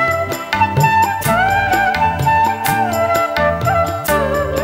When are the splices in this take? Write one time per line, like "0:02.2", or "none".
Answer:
none